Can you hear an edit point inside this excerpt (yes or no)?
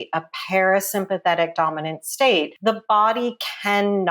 yes